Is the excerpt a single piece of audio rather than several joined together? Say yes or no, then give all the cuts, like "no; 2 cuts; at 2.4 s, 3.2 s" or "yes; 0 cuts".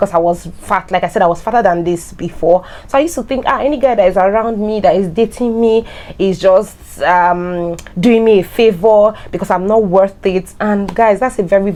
yes; 0 cuts